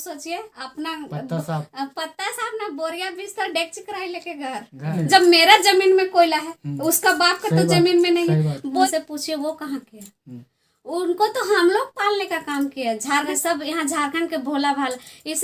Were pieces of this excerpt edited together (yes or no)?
yes